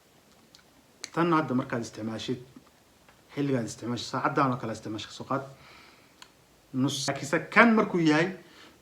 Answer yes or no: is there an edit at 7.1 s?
yes